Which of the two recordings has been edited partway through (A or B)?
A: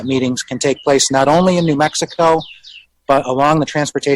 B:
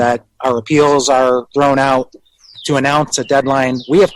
B